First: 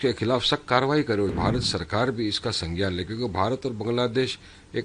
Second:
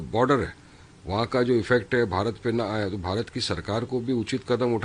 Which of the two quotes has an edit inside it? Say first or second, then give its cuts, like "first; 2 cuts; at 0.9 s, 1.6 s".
first; 1 cut; at 1.3 s